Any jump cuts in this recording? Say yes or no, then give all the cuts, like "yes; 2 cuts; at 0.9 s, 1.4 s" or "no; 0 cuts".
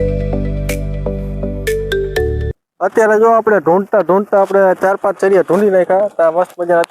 yes; 1 cut; at 2.5 s